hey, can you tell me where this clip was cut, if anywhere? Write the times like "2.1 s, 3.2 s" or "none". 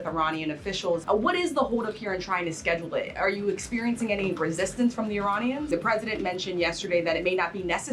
1.0 s, 5.7 s